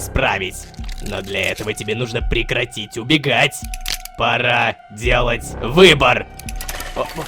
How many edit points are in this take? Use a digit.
0